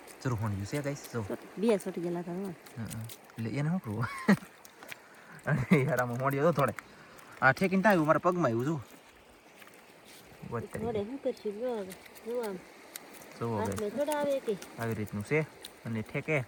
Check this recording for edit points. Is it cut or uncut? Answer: uncut